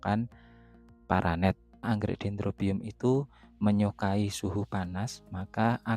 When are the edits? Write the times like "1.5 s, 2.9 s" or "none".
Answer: 1.8 s